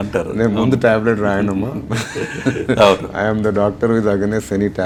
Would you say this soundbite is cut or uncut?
uncut